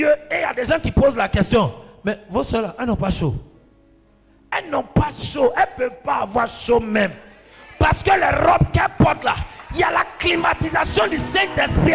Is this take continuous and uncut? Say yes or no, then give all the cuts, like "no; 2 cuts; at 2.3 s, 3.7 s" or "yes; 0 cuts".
yes; 0 cuts